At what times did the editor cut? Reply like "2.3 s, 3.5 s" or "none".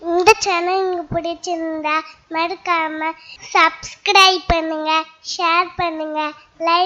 none